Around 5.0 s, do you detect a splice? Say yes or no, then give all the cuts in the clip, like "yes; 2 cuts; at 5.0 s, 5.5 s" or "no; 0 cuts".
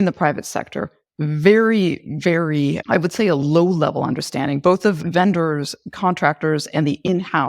yes; 1 cut; at 5.0 s